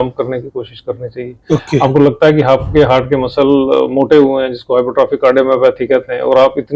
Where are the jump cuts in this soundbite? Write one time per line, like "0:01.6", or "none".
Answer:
none